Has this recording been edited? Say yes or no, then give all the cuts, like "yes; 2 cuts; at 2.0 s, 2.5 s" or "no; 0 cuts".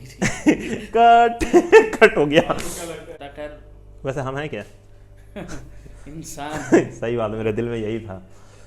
yes; 1 cut; at 3.2 s